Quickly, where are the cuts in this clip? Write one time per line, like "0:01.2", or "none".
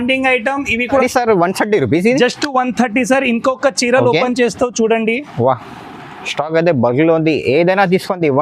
0:01.0